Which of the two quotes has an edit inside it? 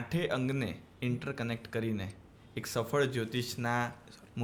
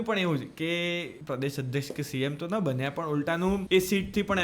second; 2 cuts; at 1.1 s, 3.6 s

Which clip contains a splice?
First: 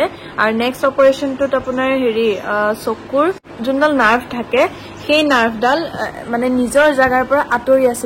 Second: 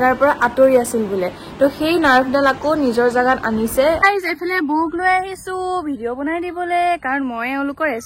second; 1 cut; at 4.0 s

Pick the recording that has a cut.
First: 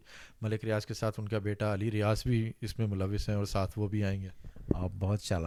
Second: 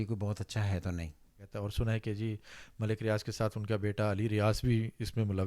second; 1 cut; at 1.5 s

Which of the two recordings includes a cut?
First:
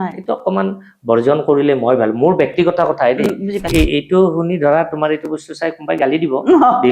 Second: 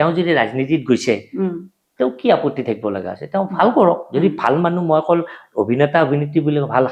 first; 1 cut; at 3.7 s

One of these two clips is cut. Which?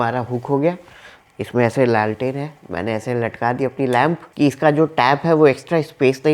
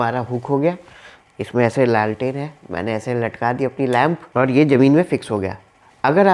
first; 1 cut; at 4.2 s

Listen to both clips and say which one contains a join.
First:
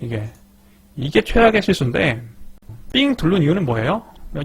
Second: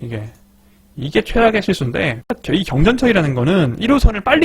second; 1 cut; at 2.3 s

